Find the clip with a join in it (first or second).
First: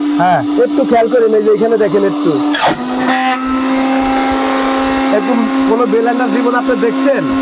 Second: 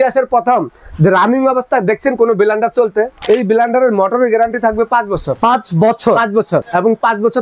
second